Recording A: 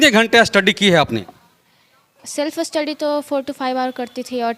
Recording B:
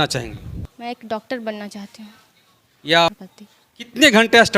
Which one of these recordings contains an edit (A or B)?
B